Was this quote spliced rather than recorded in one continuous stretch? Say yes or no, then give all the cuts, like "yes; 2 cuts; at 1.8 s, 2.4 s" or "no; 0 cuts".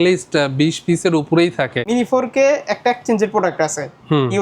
yes; 1 cut; at 1.9 s